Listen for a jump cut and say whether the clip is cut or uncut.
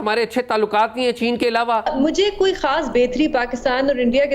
cut